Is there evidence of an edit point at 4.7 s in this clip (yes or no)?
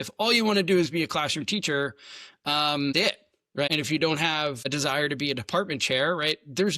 yes